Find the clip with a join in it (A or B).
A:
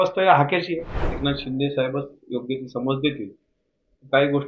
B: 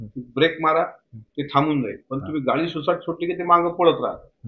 A